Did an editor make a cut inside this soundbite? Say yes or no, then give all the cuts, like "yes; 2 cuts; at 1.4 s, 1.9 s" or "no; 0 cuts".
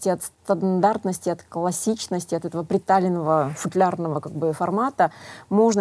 no; 0 cuts